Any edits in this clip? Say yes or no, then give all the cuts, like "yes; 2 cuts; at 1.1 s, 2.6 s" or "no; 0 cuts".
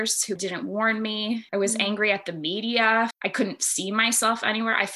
yes; 2 cuts; at 1.4 s, 3.2 s